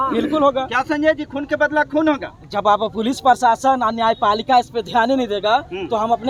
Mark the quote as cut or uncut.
uncut